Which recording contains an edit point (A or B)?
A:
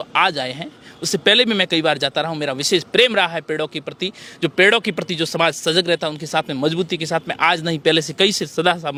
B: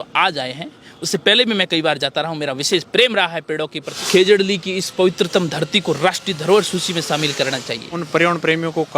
B